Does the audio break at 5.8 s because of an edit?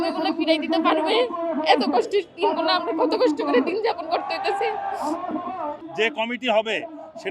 yes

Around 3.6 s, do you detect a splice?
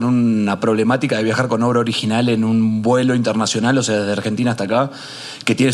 no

